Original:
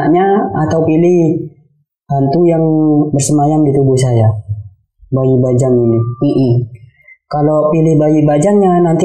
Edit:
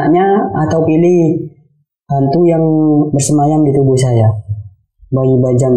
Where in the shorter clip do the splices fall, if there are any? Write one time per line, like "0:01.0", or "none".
none